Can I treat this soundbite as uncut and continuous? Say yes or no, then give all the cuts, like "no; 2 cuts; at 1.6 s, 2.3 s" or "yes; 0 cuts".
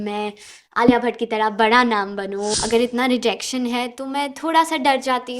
no; 1 cut; at 2.5 s